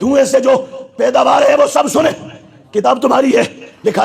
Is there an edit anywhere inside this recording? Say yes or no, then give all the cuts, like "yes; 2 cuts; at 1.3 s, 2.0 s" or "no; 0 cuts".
no; 0 cuts